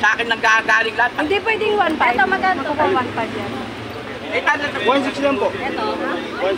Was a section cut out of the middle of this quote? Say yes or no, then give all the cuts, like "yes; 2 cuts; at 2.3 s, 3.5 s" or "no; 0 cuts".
no; 0 cuts